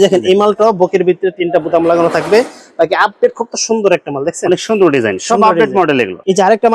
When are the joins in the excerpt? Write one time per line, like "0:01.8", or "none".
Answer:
none